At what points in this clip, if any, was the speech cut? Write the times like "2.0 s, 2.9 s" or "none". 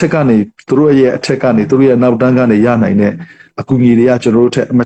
none